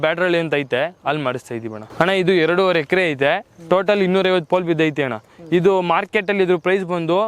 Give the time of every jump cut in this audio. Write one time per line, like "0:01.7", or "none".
0:01.8